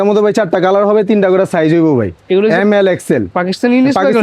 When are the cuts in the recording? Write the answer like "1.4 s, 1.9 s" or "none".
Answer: none